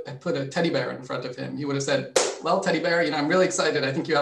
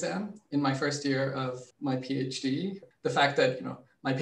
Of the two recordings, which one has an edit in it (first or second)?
second